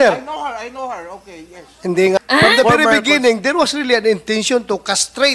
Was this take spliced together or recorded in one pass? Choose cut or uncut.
cut